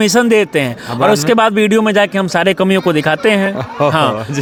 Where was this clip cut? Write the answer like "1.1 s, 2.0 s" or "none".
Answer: none